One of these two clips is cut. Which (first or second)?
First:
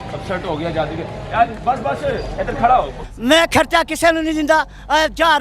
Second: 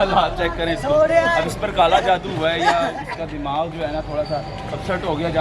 first